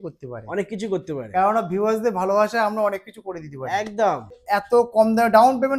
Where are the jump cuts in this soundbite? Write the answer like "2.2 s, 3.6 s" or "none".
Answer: 4.4 s